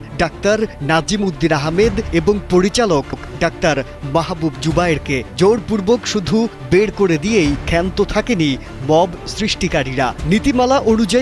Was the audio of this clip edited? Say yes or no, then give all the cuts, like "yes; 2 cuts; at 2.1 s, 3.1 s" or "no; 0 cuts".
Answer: no; 0 cuts